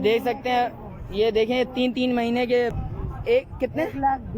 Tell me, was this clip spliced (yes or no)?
yes